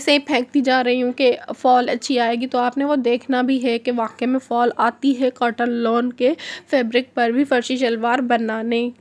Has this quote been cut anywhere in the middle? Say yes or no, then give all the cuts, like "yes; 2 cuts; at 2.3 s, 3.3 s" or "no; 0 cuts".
no; 0 cuts